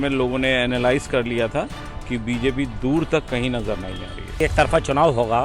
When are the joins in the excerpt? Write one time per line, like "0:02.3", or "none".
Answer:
0:04.4